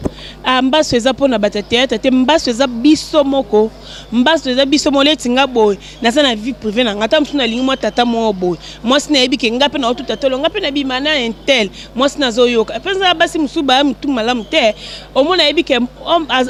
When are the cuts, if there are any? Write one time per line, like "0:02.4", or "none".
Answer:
none